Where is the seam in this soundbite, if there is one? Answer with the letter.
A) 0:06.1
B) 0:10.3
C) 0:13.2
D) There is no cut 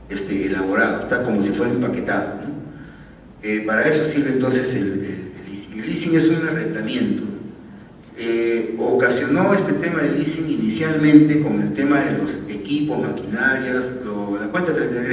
A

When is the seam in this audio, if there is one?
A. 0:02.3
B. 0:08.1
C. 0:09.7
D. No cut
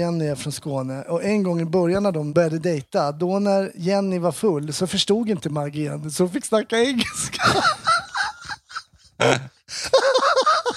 A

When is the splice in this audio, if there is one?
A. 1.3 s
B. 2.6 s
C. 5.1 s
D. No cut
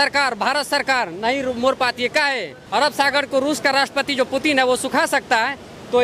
B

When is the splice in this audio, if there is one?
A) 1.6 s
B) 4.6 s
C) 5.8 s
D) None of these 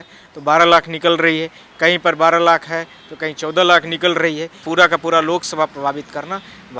B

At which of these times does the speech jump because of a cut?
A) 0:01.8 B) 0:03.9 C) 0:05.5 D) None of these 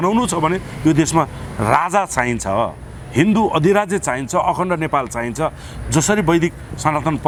D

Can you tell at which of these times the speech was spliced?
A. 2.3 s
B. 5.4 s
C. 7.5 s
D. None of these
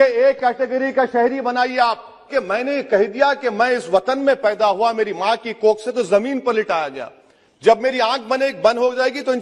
A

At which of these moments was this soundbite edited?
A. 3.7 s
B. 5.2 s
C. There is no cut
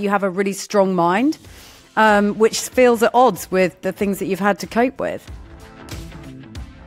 B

